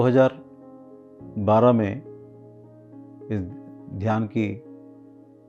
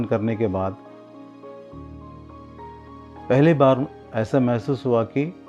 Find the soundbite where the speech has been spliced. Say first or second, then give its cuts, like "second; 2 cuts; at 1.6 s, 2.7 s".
second; 2 cuts; at 0.8 s, 2.8 s